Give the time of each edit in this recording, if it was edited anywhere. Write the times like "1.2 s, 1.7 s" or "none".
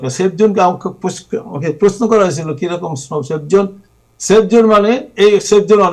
none